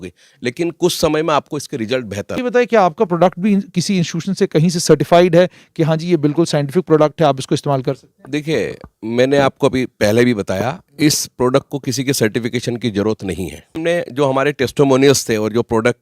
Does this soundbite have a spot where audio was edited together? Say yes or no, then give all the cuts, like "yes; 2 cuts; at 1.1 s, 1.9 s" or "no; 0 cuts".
yes; 2 cuts; at 2.4 s, 13.7 s